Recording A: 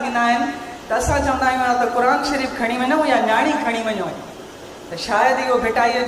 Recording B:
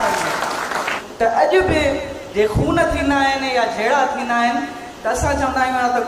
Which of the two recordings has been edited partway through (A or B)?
B